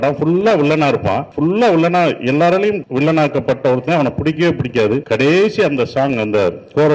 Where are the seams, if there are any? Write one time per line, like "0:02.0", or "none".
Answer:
0:01.3
0:02.9
0:05.0